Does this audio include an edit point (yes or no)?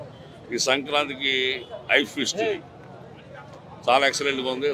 no